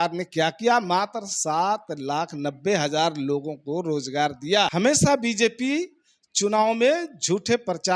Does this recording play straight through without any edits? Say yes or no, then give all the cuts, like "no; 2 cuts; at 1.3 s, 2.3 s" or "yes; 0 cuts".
no; 1 cut; at 4.7 s